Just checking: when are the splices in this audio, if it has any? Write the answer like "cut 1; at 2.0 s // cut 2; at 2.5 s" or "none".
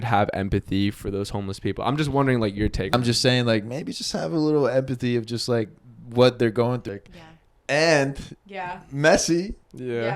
cut 1; at 2.9 s // cut 2; at 6.9 s